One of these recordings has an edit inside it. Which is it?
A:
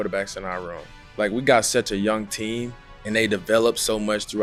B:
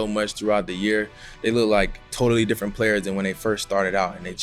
B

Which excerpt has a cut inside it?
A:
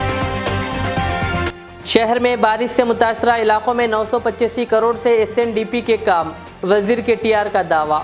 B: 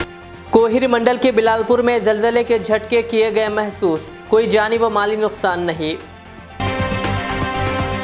A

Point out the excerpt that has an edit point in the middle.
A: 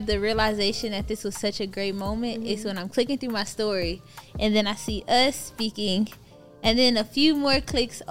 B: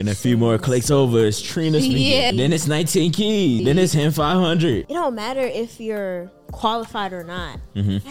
B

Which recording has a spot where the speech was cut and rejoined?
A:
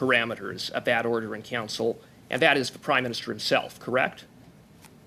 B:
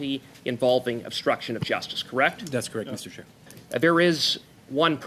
B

